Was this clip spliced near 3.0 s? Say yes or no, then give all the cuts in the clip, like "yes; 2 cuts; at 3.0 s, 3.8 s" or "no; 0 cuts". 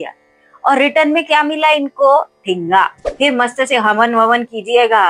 yes; 1 cut; at 3.0 s